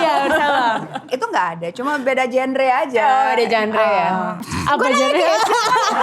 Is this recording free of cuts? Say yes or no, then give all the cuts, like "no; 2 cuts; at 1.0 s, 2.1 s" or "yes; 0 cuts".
no; 2 cuts; at 1.0 s, 4.4 s